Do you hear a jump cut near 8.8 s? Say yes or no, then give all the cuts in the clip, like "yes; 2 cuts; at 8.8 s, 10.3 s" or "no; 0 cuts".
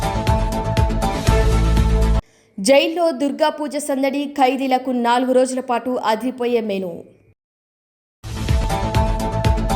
no; 1 cut; at 2.2 s